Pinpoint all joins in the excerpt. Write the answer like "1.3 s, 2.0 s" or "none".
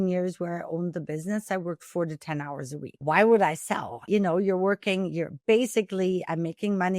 2.9 s, 4.0 s

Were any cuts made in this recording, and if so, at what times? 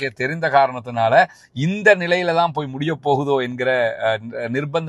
none

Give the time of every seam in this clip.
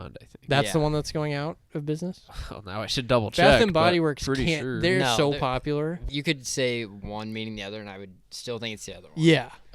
6.0 s

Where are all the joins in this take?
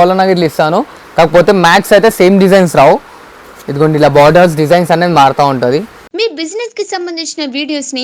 6.0 s

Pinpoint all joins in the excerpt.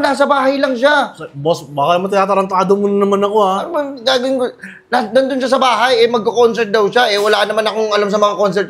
none

